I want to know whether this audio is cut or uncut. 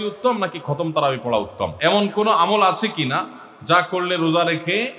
cut